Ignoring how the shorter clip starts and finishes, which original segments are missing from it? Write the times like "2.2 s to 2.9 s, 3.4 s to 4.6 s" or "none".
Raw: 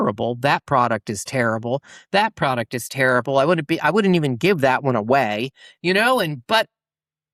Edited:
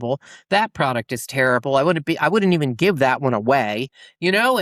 none